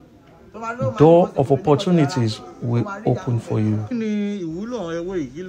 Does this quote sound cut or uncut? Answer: cut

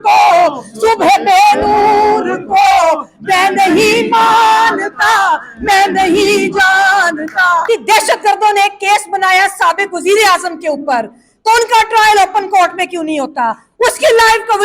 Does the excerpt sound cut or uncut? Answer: cut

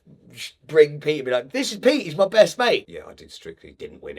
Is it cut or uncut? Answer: cut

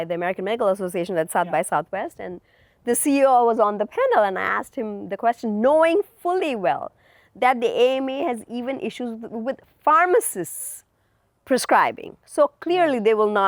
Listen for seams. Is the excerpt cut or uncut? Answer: uncut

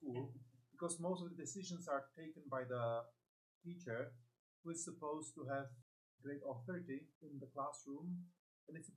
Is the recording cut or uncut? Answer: cut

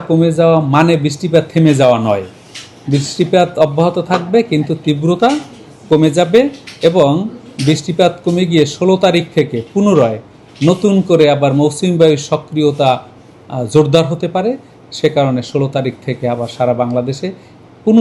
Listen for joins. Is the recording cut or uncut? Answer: uncut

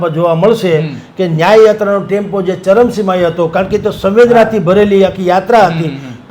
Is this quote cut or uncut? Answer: uncut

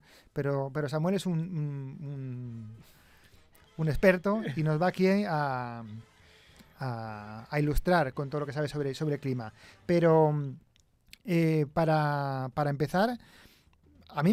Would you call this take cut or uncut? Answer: uncut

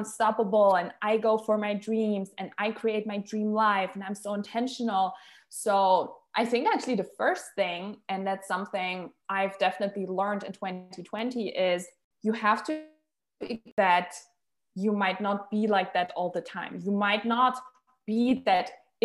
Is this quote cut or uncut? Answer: cut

